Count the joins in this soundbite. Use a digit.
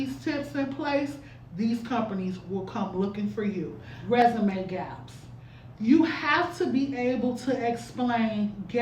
1